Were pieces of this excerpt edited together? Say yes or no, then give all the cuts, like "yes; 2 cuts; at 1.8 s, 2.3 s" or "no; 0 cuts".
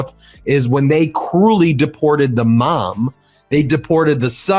no; 0 cuts